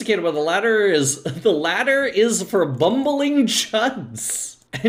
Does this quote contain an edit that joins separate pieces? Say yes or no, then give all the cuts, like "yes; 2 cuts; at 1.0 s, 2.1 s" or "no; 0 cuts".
no; 0 cuts